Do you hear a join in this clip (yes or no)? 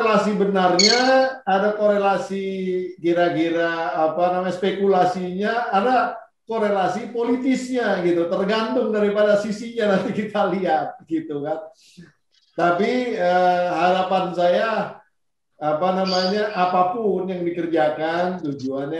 no